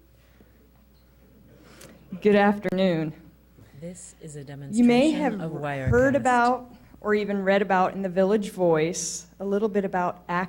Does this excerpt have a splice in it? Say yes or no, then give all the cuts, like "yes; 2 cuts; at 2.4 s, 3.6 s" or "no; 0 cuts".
yes; 2 cuts; at 3.8 s, 4.7 s